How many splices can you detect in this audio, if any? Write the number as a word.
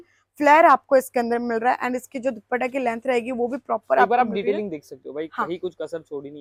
zero